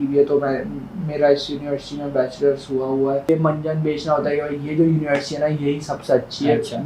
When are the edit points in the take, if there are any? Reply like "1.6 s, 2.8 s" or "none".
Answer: 3.3 s

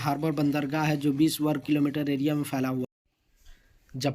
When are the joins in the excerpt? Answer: 2.8 s

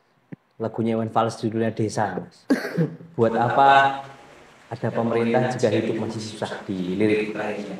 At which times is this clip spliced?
none

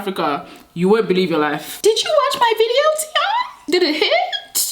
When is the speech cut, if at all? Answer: 1.6 s

